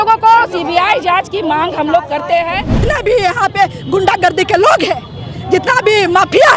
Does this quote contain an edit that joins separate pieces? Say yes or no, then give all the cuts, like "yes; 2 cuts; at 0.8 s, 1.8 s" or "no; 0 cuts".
yes; 1 cut; at 2.8 s